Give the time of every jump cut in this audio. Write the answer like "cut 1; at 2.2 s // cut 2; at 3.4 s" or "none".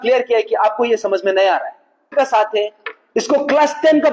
cut 1; at 2.1 s